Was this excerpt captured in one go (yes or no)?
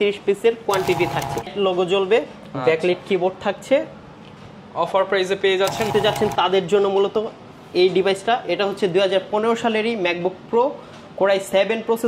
no